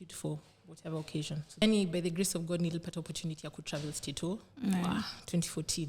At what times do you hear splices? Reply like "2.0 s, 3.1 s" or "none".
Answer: 1.6 s